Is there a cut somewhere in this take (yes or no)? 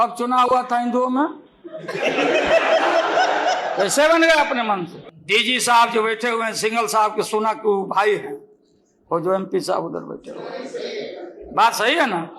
no